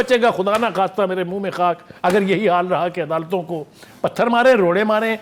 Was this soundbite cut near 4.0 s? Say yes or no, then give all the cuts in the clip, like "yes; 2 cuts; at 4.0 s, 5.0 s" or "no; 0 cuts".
no; 0 cuts